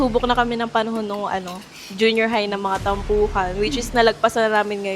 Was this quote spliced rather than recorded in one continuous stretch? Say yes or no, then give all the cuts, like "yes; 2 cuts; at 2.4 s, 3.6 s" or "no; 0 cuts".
no; 0 cuts